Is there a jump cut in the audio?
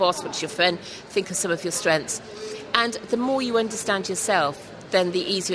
no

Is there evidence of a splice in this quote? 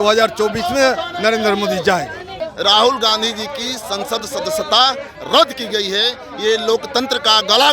yes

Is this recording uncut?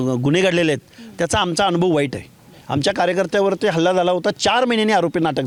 yes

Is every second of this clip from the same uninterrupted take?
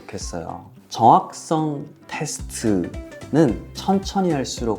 yes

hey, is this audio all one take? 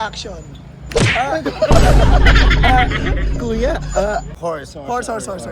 no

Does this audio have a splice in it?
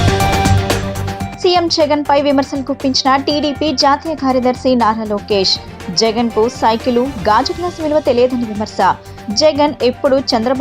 yes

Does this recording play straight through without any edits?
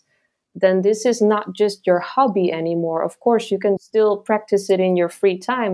no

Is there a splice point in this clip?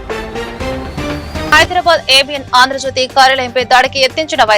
yes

